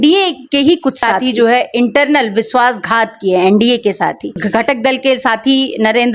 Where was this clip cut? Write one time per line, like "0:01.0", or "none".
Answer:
0:01.1
0:04.4